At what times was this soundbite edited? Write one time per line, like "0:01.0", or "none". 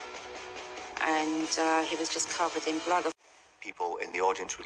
0:03.1